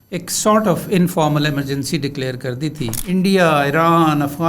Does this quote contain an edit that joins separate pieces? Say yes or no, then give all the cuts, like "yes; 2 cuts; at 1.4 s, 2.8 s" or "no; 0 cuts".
yes; 1 cut; at 3.0 s